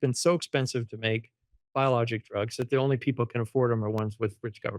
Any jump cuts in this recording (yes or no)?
no